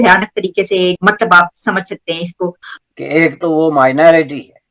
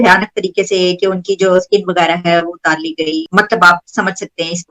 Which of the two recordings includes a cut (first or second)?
first